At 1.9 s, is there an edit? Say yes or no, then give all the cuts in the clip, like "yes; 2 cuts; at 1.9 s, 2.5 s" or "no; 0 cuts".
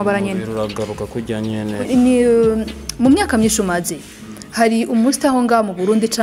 yes; 1 cut; at 1.9 s